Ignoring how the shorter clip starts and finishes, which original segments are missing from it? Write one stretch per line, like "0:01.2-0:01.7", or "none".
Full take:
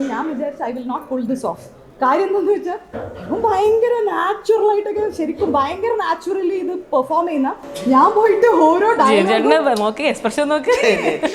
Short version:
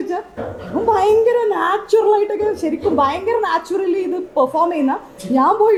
none